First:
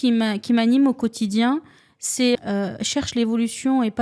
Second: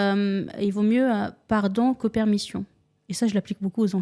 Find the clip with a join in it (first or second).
first